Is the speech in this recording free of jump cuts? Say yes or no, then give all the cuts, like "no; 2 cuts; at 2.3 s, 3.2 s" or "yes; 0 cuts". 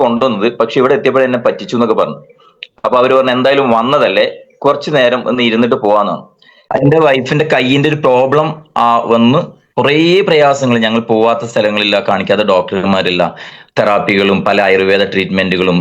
no; 1 cut; at 6.8 s